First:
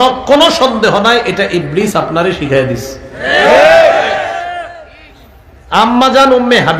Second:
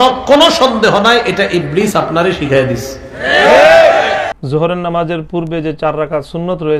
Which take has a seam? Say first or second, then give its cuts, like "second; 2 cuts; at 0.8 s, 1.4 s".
second; 1 cut; at 4.3 s